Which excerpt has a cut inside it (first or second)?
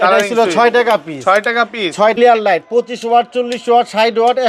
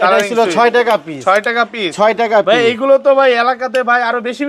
first